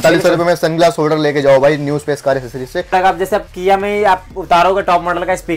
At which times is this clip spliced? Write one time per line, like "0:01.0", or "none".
0:02.9